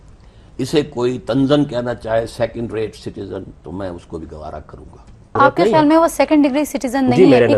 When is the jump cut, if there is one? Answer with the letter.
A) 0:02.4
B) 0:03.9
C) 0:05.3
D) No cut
C